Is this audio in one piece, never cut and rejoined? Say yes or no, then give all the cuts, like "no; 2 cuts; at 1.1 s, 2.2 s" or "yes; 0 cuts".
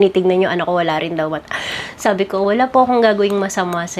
yes; 0 cuts